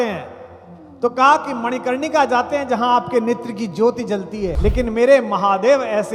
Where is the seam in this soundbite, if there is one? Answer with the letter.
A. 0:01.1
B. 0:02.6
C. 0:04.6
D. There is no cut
C